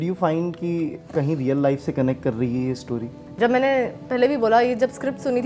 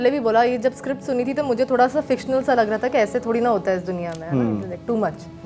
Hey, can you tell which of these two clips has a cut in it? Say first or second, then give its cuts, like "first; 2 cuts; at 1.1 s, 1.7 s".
first; 1 cut; at 3.2 s